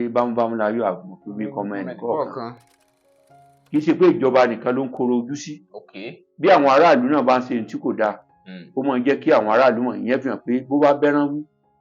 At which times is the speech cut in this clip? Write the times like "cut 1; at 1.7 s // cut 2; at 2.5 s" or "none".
cut 1; at 3.0 s